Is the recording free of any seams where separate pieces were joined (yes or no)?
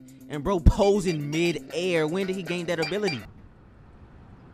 no